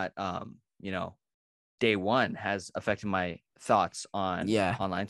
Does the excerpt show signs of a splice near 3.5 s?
yes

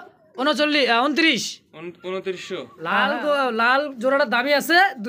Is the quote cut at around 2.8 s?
yes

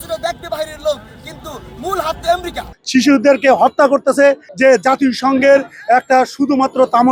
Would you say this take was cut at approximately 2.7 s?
yes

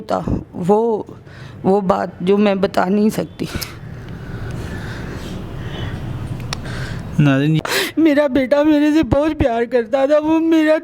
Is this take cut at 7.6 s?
yes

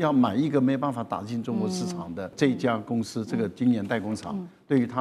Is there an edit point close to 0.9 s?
no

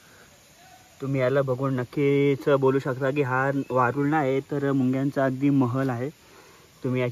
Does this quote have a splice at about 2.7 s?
no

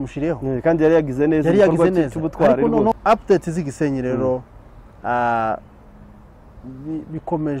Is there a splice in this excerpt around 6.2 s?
no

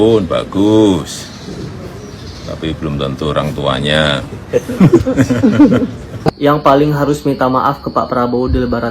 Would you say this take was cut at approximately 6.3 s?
yes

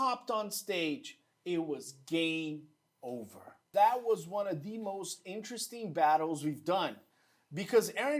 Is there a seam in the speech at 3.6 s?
yes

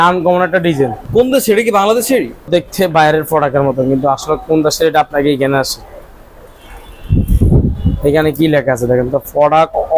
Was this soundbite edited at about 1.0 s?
yes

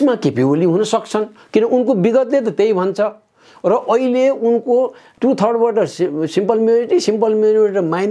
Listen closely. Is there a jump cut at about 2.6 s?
no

